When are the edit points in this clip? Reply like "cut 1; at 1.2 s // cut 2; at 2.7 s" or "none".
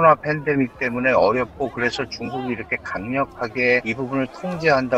none

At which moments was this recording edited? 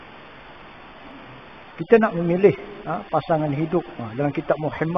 cut 1; at 1.1 s

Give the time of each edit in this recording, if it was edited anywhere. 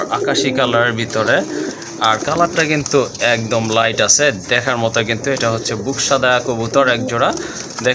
none

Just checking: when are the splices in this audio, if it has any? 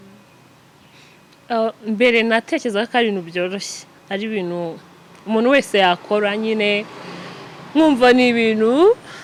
none

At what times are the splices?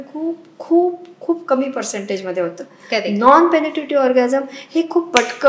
none

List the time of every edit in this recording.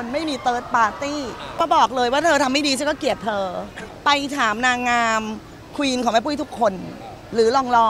cut 1; at 1.6 s // cut 2; at 3.8 s

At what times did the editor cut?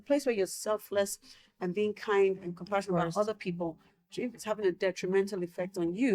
none

